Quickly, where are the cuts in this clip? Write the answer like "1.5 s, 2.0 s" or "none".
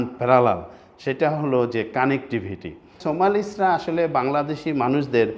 3.0 s